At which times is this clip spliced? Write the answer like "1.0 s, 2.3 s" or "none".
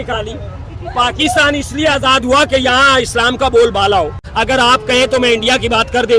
4.6 s